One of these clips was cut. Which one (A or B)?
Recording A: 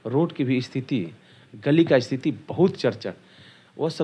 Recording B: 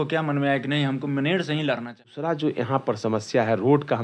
B